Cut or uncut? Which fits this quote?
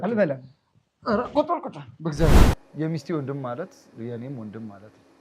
cut